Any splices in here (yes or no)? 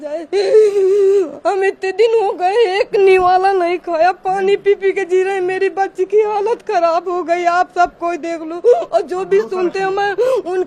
no